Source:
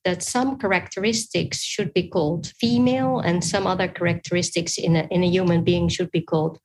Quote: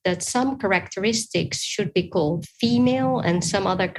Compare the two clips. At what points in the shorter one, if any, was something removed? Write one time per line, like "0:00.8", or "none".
none